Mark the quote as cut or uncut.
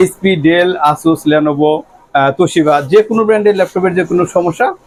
uncut